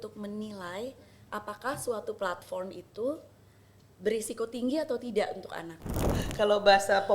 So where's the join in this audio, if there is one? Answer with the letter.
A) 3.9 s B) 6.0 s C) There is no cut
B